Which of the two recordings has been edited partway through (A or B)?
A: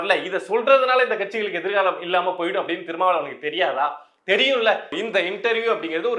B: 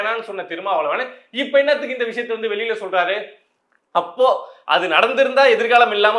A